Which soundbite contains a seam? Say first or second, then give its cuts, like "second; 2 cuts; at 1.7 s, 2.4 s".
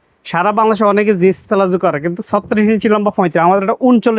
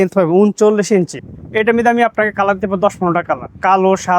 second; 1 cut; at 1.2 s